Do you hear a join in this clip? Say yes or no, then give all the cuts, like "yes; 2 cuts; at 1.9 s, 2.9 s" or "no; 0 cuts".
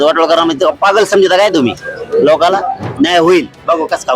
yes; 1 cut; at 2.8 s